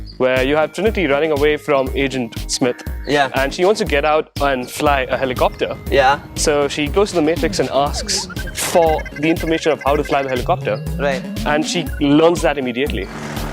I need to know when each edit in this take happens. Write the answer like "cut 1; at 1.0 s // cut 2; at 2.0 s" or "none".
cut 1; at 6.3 s